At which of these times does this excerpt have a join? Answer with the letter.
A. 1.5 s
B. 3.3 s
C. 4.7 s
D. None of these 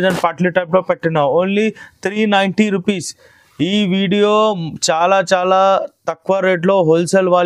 D